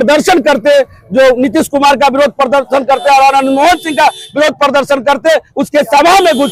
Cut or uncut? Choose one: uncut